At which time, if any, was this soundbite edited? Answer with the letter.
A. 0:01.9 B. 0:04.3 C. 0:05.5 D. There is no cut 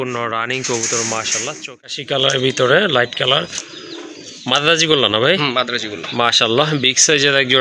A